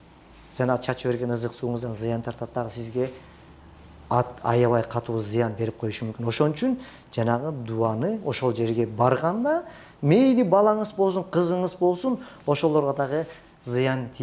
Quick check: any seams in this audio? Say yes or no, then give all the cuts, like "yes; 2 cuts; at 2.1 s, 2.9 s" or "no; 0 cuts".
no; 0 cuts